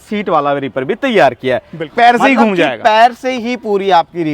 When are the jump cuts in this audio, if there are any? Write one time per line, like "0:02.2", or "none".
0:01.8